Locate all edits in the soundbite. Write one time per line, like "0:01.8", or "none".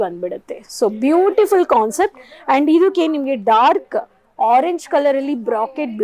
none